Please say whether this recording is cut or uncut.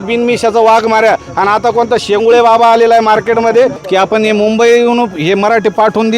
cut